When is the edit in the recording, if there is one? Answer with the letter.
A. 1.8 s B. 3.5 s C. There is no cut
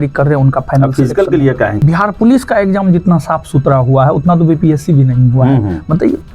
A